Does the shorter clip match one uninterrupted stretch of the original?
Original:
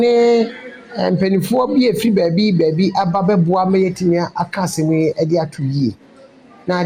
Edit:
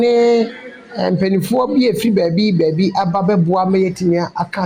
yes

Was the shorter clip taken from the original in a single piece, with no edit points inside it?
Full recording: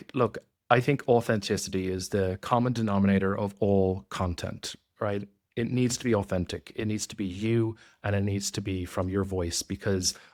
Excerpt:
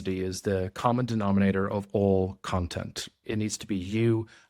no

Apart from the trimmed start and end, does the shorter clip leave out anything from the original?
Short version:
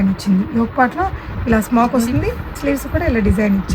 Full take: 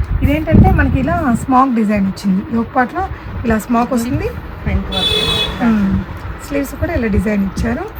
yes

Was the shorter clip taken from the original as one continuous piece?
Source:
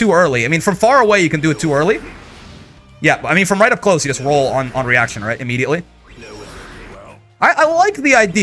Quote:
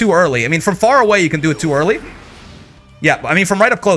yes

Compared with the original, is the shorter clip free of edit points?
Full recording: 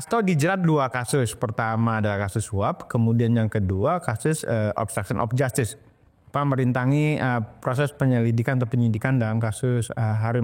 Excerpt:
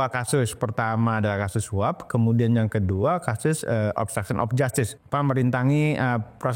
no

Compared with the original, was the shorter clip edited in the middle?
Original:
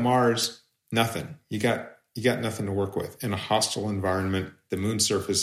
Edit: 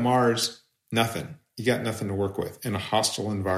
yes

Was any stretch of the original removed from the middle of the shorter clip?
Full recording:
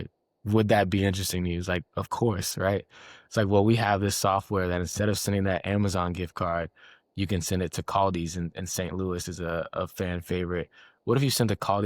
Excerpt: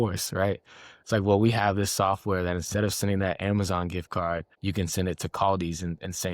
yes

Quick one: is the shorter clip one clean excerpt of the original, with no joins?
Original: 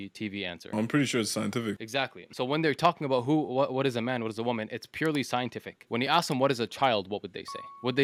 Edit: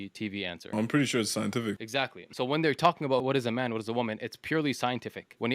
no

